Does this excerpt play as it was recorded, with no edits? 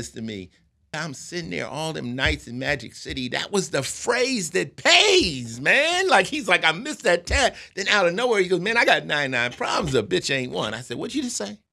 no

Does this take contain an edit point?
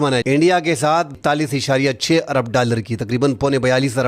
yes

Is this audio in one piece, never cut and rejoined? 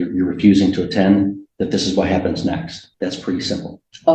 no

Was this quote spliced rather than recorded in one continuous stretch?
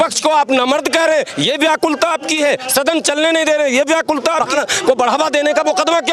yes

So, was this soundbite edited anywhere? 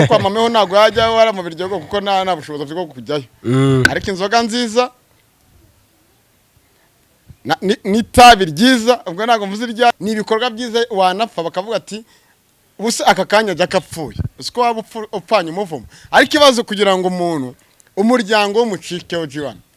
yes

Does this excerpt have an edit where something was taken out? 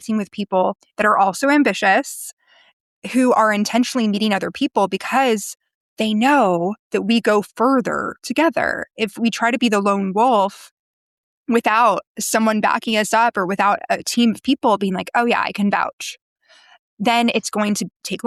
no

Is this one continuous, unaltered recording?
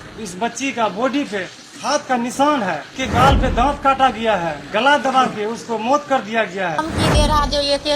no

